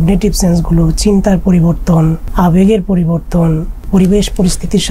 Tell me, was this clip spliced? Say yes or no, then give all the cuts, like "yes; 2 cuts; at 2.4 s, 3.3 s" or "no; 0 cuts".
yes; 2 cuts; at 2.2 s, 3.9 s